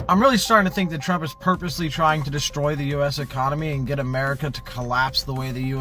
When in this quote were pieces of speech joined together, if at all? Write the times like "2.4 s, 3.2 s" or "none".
none